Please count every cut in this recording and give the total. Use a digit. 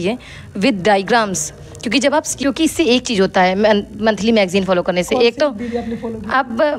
1